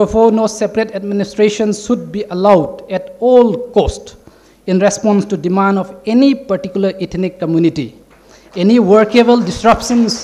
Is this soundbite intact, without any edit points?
yes; 0 cuts

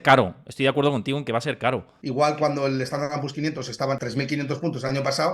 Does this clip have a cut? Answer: yes; 2 cuts; at 1.9 s, 4.0 s

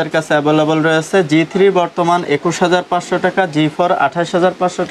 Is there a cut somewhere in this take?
no; 0 cuts

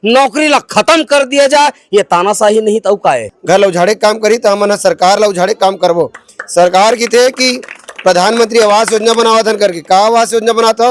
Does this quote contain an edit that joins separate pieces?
yes; 1 cut; at 3.3 s

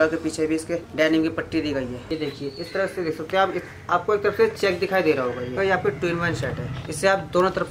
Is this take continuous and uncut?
no; 3 cuts; at 2.0 s, 5.6 s, 6.8 s

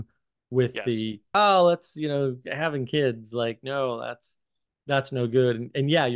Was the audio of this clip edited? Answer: yes; 1 cut; at 1.2 s

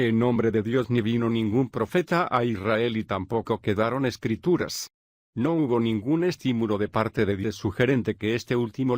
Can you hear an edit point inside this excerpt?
no; 0 cuts

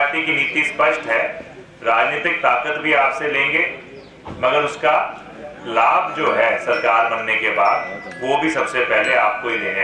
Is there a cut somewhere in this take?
no; 0 cuts

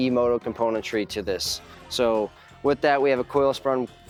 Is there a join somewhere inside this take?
no; 0 cuts

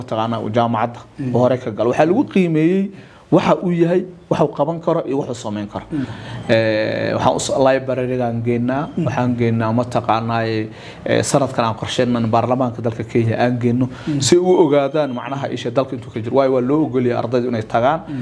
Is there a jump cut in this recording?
yes; 1 cut; at 6.1 s

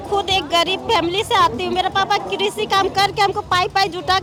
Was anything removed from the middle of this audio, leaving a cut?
no; 0 cuts

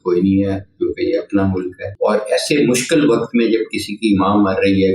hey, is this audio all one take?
no; 1 cut; at 1.8 s

